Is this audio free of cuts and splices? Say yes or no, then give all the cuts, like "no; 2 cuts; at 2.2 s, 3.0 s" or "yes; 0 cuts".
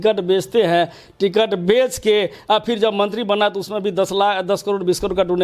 yes; 0 cuts